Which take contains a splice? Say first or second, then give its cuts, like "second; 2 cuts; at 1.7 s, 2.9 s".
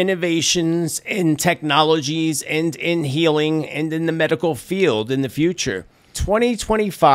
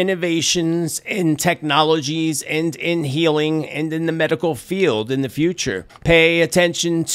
first; 1 cut; at 5.9 s